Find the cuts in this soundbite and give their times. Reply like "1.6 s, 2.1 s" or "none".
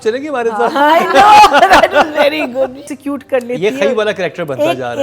2.9 s